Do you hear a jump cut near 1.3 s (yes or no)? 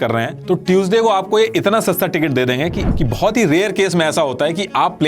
no